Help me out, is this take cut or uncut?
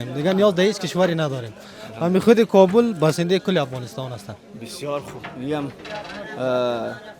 uncut